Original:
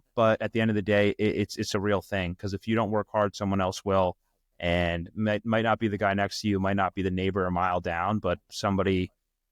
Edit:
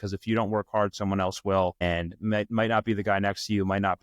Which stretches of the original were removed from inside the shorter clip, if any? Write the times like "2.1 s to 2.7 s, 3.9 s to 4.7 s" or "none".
4.2 s to 4.8 s